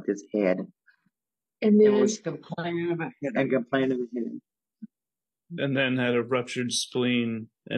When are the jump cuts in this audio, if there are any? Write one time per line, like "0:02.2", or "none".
0:05.6